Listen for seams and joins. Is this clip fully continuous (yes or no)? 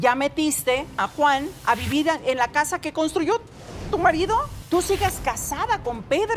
no